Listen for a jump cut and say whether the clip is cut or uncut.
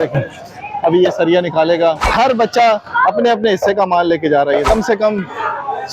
cut